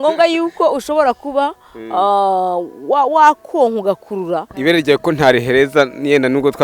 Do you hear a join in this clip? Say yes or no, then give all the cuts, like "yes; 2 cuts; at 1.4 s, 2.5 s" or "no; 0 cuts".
yes; 1 cut; at 4.5 s